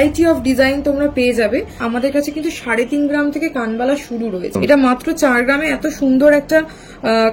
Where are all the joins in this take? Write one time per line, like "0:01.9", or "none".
0:01.8
0:04.5